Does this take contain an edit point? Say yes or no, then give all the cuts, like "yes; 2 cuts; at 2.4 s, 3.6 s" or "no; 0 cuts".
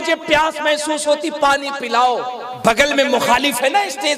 yes; 1 cut; at 2.4 s